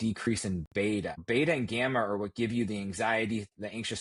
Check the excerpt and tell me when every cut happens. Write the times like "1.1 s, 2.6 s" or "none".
1.2 s